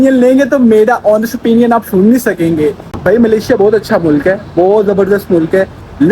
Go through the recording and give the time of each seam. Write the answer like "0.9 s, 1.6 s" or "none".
2.8 s